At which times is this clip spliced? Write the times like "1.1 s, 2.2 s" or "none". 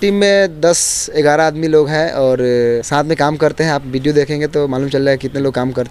none

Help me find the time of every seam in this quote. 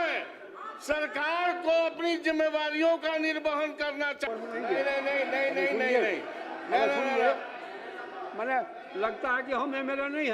4.3 s

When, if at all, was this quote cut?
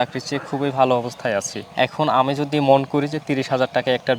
1.6 s

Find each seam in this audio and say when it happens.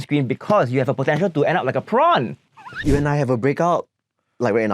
2.8 s

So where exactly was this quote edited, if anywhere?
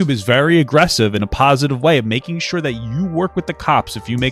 none

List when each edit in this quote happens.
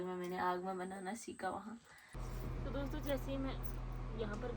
2.2 s

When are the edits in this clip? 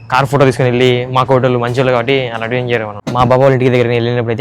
3.0 s

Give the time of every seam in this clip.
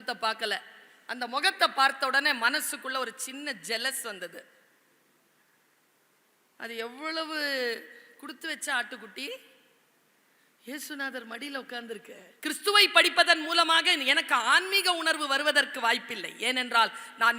12.2 s

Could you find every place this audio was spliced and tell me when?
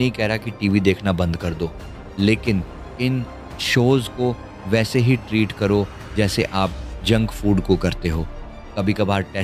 none

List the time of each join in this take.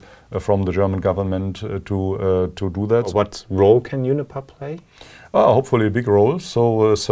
3.1 s

